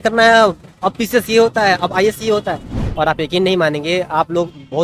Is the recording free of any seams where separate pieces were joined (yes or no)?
no